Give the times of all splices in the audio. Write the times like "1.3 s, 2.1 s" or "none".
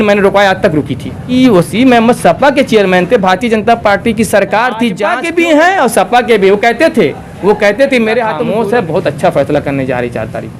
1.2 s, 5.1 s, 8.4 s

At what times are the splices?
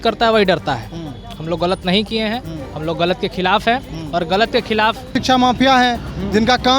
5.2 s

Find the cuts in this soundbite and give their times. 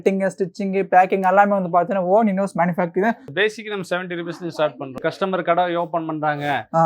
3.3 s, 5.0 s

